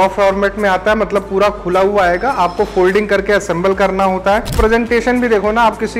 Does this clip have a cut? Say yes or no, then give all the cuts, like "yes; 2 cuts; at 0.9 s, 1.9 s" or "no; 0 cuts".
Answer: yes; 1 cut; at 4.6 s